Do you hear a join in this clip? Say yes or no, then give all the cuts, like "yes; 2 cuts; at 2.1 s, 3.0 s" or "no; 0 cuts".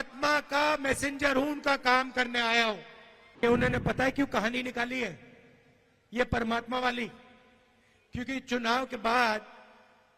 yes; 1 cut; at 3.4 s